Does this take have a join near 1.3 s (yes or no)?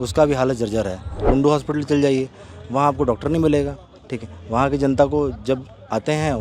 yes